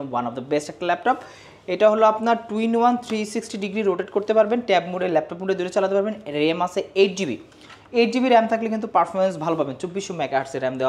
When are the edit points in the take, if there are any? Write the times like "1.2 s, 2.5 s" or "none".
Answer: none

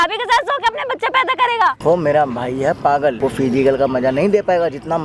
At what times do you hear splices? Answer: 1.8 s, 3.2 s

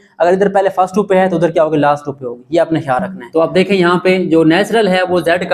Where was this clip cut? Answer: 3.2 s

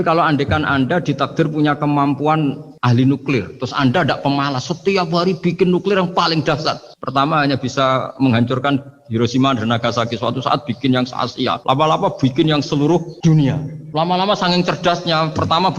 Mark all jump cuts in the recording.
2.7 s, 11.6 s, 13.4 s

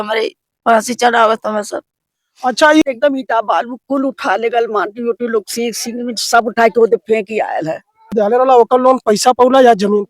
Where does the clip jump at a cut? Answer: 2.8 s, 8.1 s

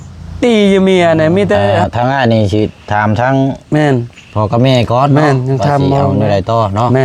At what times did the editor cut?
1.8 s

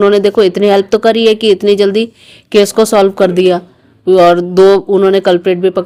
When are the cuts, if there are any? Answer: none

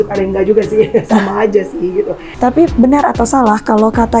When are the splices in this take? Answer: 2.2 s

